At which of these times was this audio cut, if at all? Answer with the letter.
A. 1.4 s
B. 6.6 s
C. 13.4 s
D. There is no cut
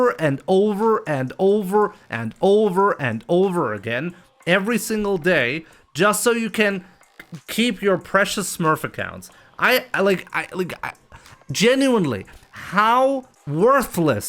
C